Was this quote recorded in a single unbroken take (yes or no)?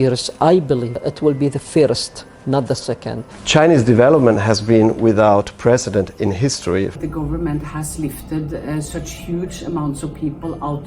no